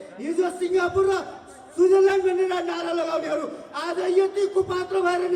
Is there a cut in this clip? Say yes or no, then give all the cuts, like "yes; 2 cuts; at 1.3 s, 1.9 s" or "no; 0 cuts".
no; 0 cuts